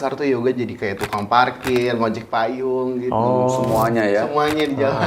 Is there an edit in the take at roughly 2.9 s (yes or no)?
no